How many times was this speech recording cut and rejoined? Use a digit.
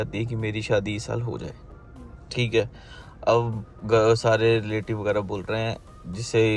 0